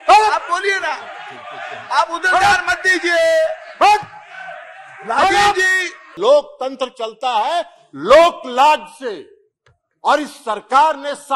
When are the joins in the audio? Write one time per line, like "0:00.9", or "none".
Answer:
0:06.1